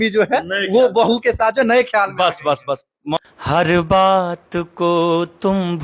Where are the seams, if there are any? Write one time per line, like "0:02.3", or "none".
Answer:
0:03.2

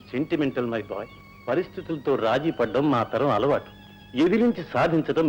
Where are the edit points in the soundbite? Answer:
none

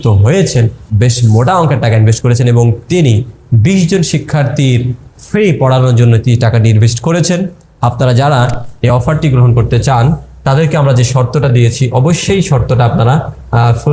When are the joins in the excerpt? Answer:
none

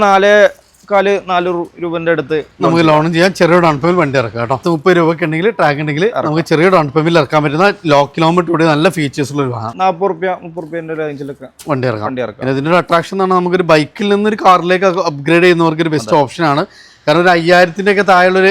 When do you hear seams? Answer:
0:04.6
0:09.6

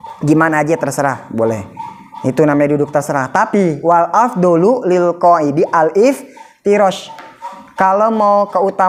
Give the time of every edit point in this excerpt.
none

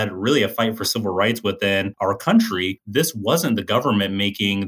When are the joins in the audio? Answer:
0:01.9
0:02.9

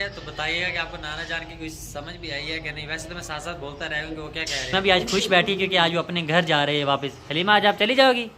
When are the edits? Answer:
0:04.7

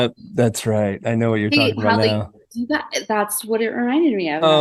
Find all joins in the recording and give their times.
none

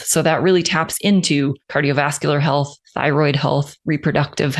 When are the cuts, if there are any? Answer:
0:01.6
0:02.8
0:03.7

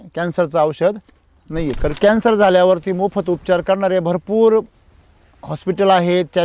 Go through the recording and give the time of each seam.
0:02.0

